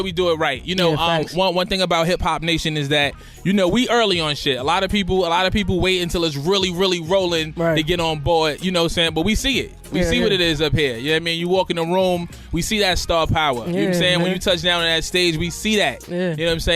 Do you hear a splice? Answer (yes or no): yes